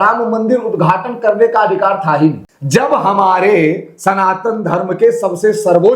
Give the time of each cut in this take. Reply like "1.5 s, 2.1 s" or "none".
2.5 s